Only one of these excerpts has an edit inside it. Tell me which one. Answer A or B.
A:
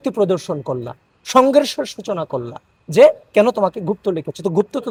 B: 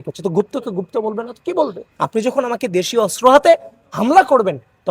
B